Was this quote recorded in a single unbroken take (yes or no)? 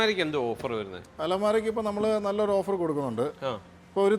yes